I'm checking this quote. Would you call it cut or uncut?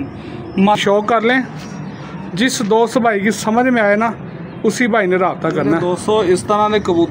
cut